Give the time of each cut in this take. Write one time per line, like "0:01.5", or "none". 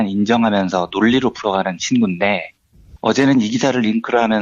0:02.9